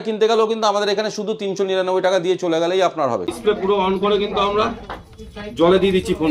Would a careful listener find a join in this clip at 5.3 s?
no; 1 cut; at 3.3 s

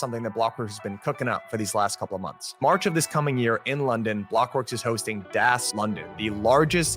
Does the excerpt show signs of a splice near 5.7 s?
yes; 1 cut; at 5.7 s

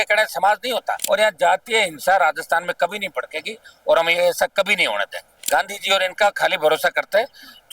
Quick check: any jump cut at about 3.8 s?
no; 2 cuts; at 1.0 s, 5.4 s

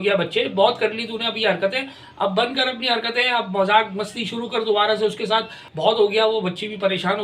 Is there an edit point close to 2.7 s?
no; 1 cut; at 5.6 s

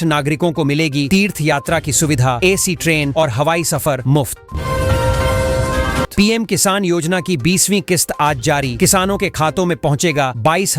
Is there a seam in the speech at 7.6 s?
no; 2 cuts; at 4.5 s, 6.1 s

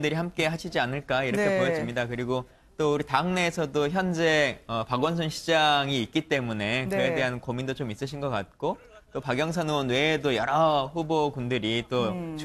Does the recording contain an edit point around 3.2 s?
yes; 1 cut; at 3.2 s

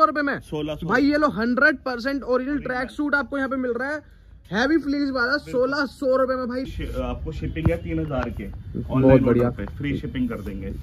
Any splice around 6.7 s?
yes; 1 cut; at 6.7 s

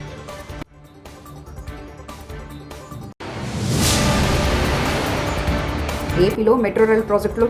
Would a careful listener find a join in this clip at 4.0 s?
no; 1 cut; at 6.1 s

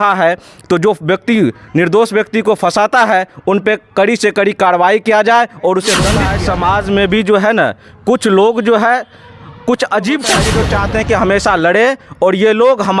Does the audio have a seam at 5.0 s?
no; 2 cuts; at 6.3 s, 10.5 s

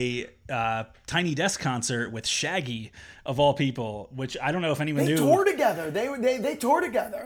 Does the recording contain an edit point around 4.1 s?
no; 0 cuts

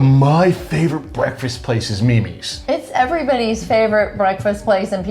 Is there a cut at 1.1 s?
no; 1 cut; at 2.5 s

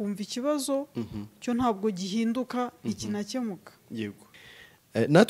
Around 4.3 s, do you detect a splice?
yes; 1 cut; at 4.3 s

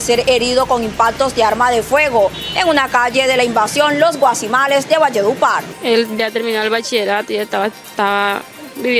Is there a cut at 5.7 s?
yes; 1 cut; at 5.7 s

